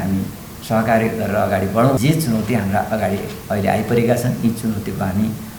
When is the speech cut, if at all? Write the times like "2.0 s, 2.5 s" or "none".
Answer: 2.0 s